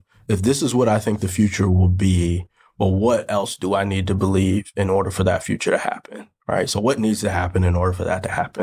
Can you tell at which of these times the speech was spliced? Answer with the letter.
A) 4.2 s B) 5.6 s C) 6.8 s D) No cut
D